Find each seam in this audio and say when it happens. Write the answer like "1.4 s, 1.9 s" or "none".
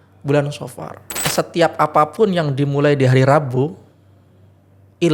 1.3 s